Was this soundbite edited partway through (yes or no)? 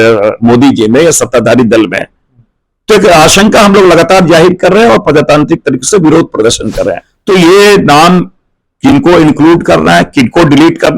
yes